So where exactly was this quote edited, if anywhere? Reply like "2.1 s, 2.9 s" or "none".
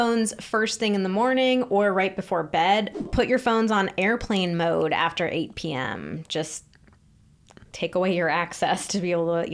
3.0 s